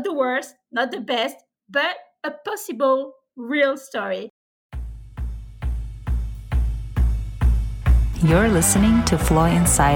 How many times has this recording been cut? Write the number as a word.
one